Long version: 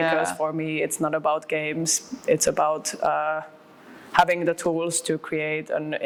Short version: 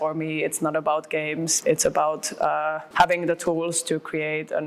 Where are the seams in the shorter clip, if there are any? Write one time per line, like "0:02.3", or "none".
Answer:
0:01.5
0:02.8